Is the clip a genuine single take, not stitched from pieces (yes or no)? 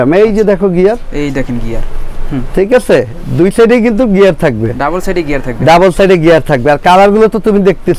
yes